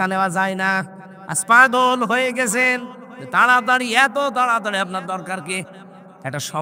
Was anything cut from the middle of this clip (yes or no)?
no